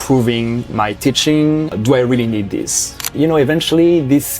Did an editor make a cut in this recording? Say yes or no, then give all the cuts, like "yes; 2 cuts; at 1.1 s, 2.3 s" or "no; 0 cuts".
yes; 2 cuts; at 1.7 s, 3.0 s